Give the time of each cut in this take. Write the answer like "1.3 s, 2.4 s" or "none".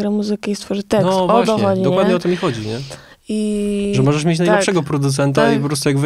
none